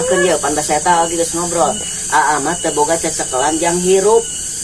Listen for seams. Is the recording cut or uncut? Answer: uncut